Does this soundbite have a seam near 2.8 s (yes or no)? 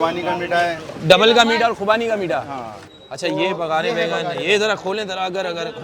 yes